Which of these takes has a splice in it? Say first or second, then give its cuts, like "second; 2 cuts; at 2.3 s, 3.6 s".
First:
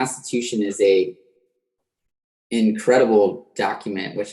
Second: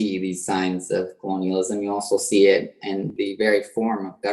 second; 1 cut; at 3.2 s